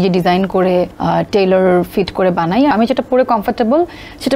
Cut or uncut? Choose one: cut